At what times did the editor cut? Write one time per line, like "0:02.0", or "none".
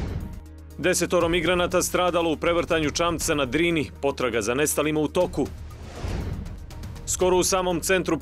none